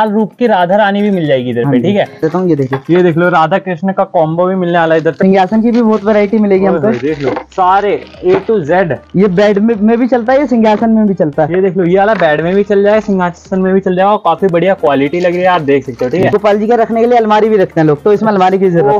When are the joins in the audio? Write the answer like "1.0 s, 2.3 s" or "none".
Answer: 2.2 s, 5.2 s, 16.2 s